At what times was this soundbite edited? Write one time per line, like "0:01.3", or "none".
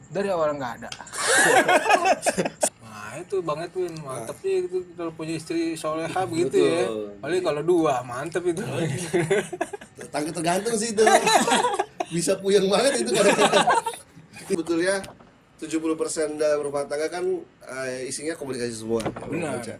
0:02.7
0:14.6